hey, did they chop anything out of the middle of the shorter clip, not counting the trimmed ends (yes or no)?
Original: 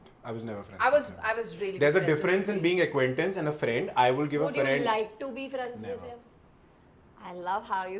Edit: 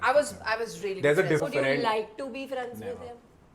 yes